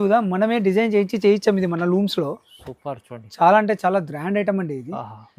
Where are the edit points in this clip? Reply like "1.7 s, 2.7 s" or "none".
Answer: none